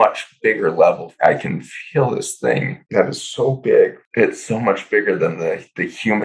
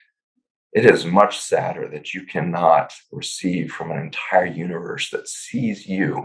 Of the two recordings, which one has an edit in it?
first; 3 cuts; at 1.1 s, 2.8 s, 4.0 s

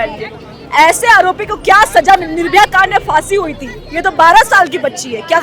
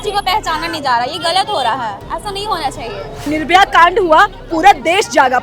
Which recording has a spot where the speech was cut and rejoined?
second; 1 cut; at 3.3 s

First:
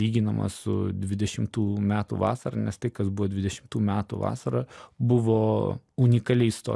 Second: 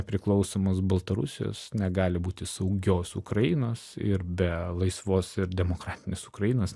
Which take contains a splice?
first; 2 cuts; at 4.8 s, 5.8 s

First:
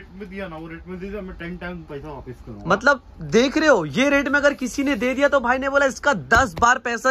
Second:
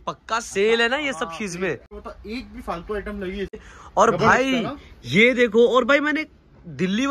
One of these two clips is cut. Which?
second; 2 cuts; at 2.0 s, 3.8 s

